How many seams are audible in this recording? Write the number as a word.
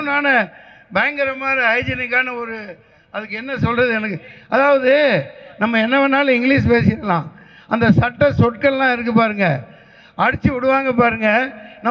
zero